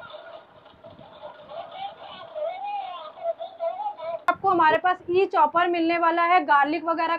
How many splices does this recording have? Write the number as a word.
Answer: one